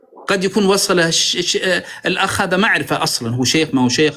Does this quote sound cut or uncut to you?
uncut